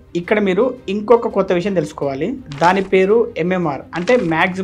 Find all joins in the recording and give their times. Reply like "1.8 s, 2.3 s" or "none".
none

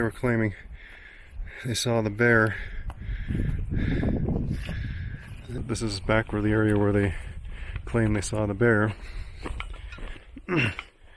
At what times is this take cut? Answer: 5.4 s

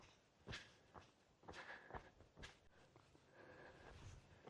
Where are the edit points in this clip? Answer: none

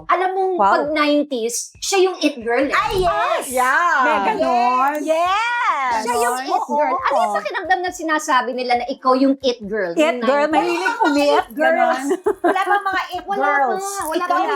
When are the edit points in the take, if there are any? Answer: none

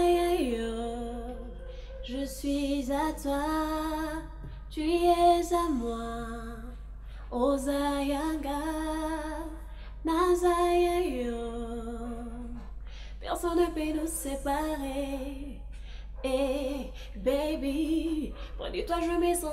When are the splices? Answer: none

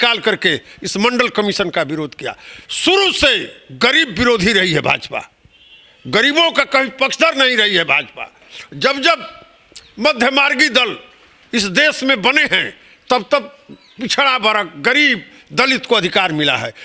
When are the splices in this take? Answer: none

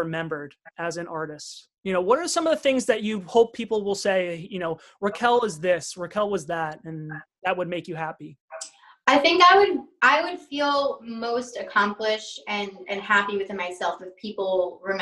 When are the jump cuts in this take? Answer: none

